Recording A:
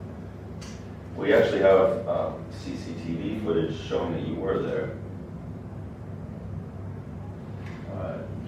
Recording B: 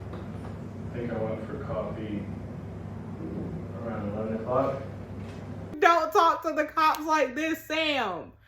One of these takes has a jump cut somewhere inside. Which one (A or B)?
B